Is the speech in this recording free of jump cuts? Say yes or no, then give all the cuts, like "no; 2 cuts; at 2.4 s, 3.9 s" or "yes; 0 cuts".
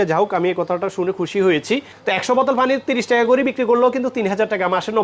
no; 1 cut; at 1.9 s